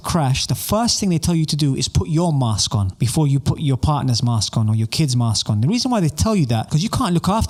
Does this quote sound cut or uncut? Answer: uncut